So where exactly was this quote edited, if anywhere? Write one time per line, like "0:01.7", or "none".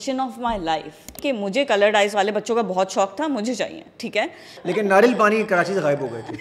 0:01.1
0:04.5